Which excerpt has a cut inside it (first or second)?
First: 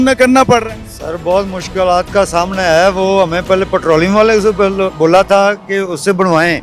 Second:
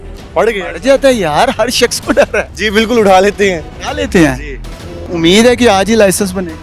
second